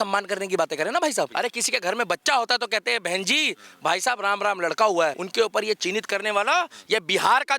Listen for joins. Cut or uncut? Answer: cut